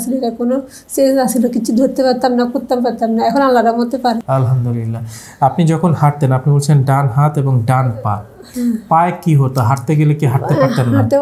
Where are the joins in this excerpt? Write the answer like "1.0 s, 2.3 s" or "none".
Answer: none